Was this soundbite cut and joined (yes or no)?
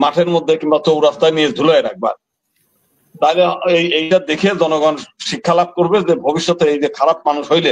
no